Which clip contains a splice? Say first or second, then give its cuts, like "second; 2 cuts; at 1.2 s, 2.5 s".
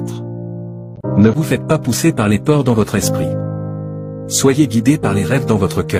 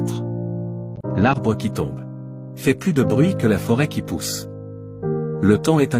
second; 1 cut; at 1.0 s